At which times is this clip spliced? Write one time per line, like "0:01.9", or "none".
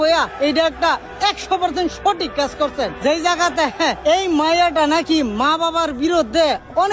none